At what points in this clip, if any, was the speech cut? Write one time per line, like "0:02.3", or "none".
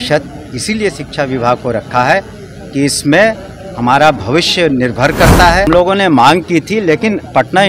0:05.7